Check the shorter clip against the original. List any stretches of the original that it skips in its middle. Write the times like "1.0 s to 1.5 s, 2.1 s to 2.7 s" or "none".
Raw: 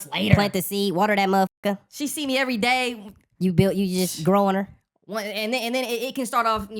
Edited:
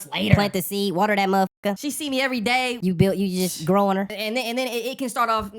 1.8 s to 2.0 s, 2.9 s to 3.3 s, 4.7 s to 5.3 s